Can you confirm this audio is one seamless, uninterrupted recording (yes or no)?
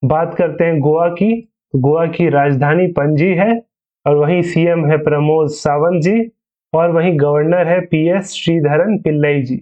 yes